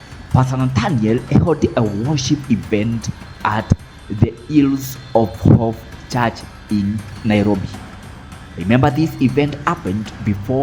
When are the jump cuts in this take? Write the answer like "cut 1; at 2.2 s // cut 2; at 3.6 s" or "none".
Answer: cut 1; at 7.1 s